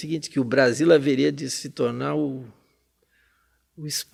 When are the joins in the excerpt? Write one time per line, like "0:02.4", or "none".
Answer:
none